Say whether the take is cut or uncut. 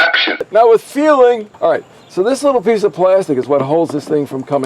cut